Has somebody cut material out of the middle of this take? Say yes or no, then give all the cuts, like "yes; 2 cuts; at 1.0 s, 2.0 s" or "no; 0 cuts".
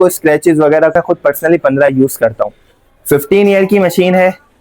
yes; 1 cut; at 0.9 s